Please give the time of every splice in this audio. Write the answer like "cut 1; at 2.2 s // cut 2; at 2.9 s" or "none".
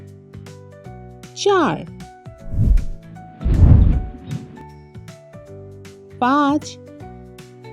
cut 1; at 0.8 s // cut 2; at 1.9 s